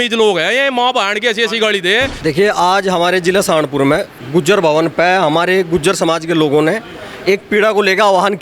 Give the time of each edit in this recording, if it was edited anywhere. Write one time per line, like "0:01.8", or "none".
0:02.1